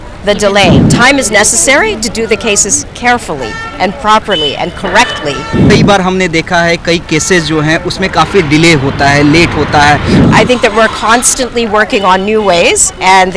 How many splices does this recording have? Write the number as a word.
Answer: three